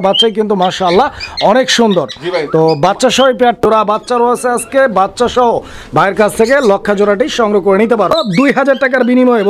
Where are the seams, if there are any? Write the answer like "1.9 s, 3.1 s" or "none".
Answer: 3.6 s, 8.1 s